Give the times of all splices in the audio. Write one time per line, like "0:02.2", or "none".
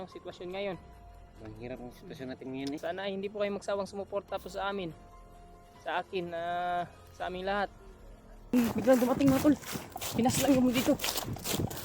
0:02.8
0:08.5